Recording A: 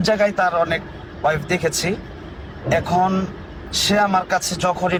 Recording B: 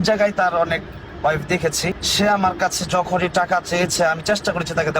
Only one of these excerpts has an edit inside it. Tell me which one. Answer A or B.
B